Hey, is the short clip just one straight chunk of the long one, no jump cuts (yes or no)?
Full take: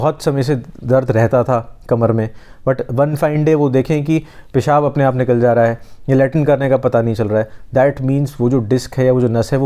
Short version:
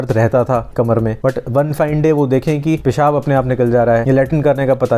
no